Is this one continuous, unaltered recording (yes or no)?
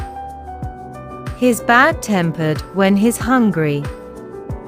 yes